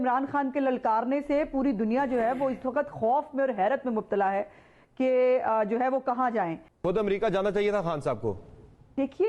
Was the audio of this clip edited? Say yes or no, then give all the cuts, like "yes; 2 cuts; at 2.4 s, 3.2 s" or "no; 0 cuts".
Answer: yes; 1 cut; at 6.7 s